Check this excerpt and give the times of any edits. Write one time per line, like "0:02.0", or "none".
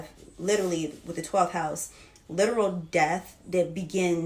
none